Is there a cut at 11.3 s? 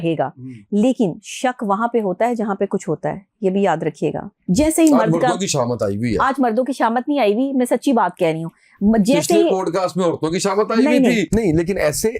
yes; 2 cuts; at 4.3 s, 11.3 s

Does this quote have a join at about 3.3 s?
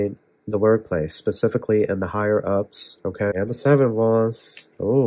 yes; 1 cut; at 3.3 s

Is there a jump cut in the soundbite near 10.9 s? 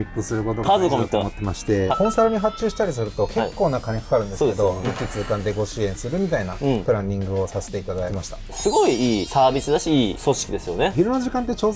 yes; 4 cuts; at 1.9 s, 4.9 s, 8.5 s, 10.9 s

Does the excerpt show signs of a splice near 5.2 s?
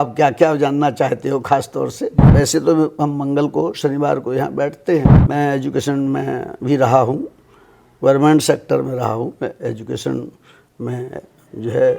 yes; 2 cuts; at 2.2 s, 5.2 s

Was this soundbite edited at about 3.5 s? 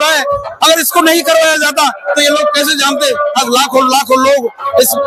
no; 0 cuts

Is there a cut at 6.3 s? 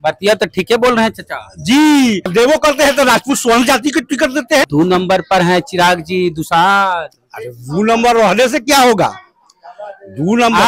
no; 2 cuts; at 2.3 s, 4.7 s

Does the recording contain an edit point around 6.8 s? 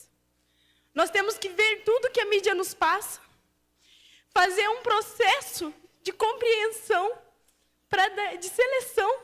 yes; 1 cut; at 6.8 s

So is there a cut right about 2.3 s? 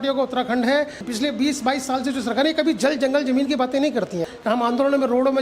no; 2 cuts; at 1.0 s, 4.3 s

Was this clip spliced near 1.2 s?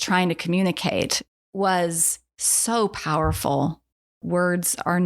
yes; 2 cuts; at 1.2 s, 4.2 s

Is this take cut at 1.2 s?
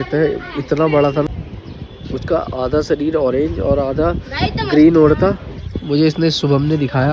yes; 1 cut; at 1.2 s

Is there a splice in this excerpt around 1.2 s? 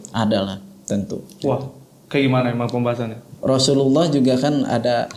no; 0 cuts

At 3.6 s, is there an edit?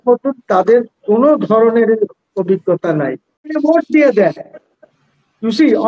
yes; 1 cut; at 3.6 s

